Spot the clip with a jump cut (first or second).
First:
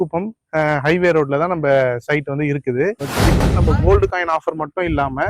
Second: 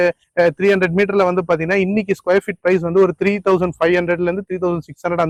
first